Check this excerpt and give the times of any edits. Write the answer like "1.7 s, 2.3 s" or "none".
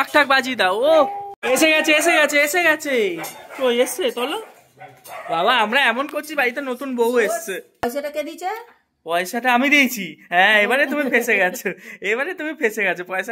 1.4 s, 7.8 s